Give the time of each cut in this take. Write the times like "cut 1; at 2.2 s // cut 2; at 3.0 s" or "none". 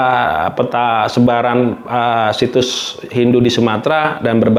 none